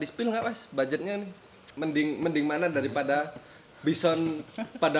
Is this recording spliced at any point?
yes; 1 cut; at 1.6 s

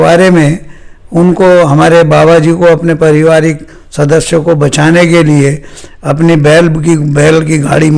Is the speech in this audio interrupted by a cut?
no; 0 cuts

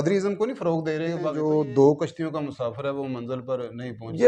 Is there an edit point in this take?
yes; 1 cut; at 1.2 s

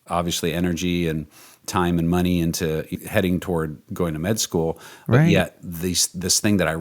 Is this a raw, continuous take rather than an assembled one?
no; 2 cuts; at 2.9 s, 3.8 s

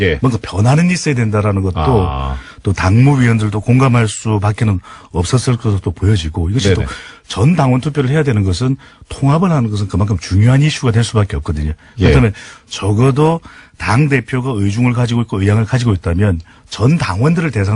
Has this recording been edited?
no; 0 cuts

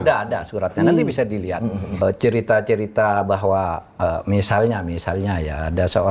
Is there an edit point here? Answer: yes; 1 cut; at 2.0 s

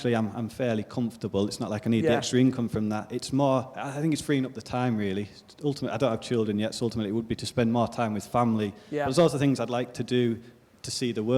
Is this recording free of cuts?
yes; 0 cuts

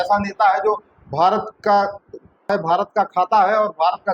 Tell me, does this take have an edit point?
yes; 1 cut; at 2.5 s

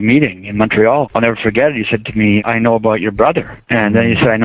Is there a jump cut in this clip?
yes; 2 cuts; at 2.4 s, 3.5 s

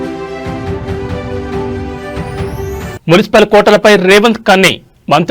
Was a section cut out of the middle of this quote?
yes; 1 cut; at 1.7 s

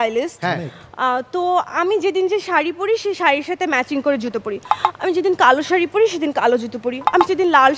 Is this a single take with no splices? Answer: yes; 0 cuts

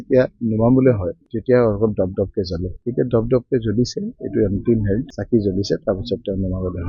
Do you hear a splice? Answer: no; 0 cuts

